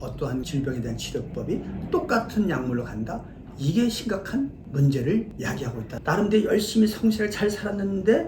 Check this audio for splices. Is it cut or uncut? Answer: cut